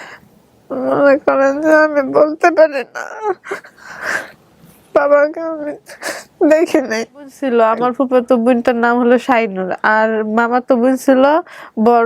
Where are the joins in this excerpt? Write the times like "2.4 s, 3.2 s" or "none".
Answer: 7.4 s